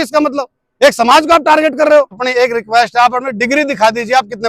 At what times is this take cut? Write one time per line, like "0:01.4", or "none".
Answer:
0:02.2